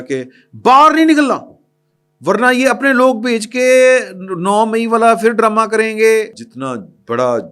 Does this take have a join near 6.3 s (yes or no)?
yes